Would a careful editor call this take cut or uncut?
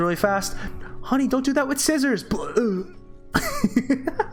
uncut